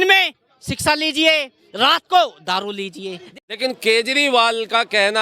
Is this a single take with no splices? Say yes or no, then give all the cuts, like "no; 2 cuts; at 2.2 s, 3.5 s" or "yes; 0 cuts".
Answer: no; 1 cut; at 3.2 s